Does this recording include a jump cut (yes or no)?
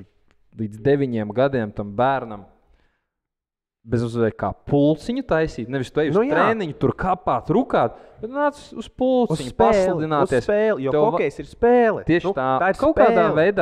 no